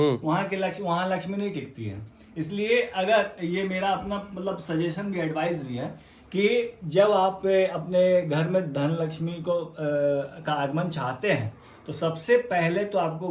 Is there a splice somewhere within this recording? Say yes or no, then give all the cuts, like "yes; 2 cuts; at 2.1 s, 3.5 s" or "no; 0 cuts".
no; 0 cuts